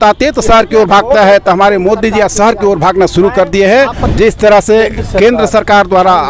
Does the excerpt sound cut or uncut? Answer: cut